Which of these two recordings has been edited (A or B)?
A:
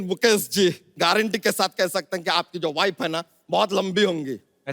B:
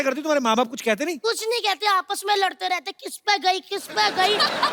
A